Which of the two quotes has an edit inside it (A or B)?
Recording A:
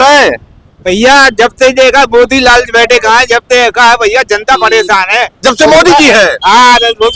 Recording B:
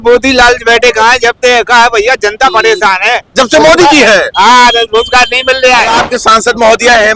B